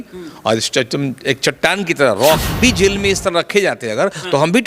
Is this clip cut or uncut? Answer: cut